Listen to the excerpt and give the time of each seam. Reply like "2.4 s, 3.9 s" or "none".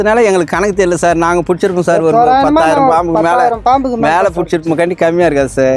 none